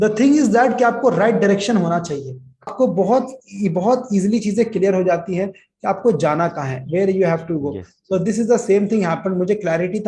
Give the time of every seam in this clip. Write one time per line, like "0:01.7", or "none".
0:02.7